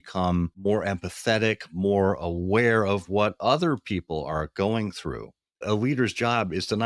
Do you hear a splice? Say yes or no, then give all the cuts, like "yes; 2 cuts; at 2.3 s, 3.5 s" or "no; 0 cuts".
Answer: yes; 1 cut; at 5.6 s